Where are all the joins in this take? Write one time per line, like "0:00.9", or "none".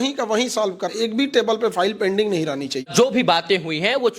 0:00.9
0:02.9